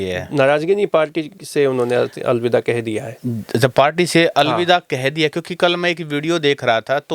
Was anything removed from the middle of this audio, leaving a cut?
no; 0 cuts

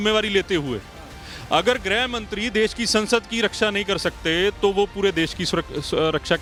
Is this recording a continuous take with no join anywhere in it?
yes; 0 cuts

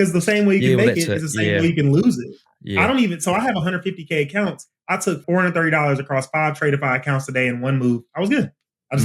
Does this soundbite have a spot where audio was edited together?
yes; 1 cut; at 5.2 s

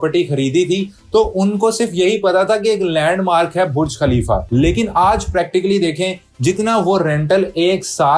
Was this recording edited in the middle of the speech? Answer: yes; 1 cut; at 4.4 s

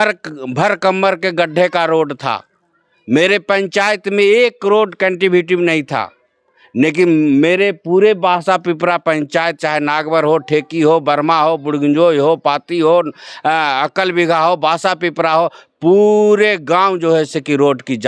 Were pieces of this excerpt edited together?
no; 0 cuts

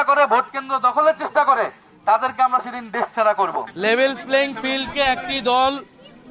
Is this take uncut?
no; 1 cut; at 3.7 s

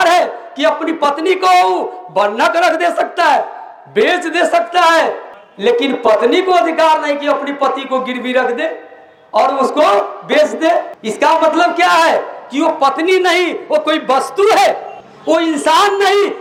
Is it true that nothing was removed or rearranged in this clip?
yes; 0 cuts

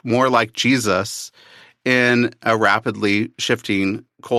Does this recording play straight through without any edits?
yes; 0 cuts

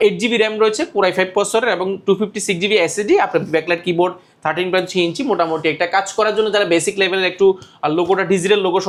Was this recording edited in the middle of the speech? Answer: no; 0 cuts

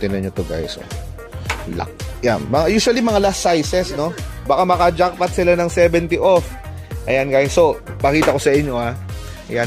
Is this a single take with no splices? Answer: yes; 0 cuts

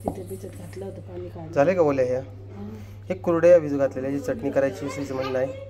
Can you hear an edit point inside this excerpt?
no; 0 cuts

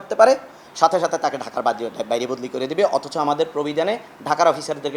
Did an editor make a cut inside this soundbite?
no; 0 cuts

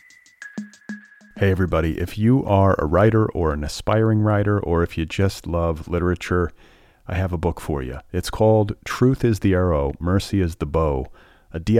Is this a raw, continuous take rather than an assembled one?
no; 1 cut; at 0.9 s

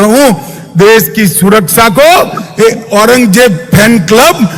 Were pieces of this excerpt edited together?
no; 0 cuts

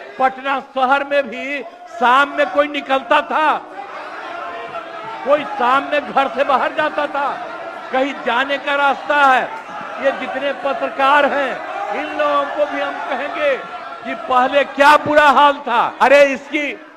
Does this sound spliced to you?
yes; 1 cut; at 15.9 s

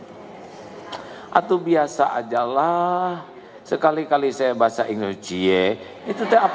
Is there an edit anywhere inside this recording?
no; 0 cuts

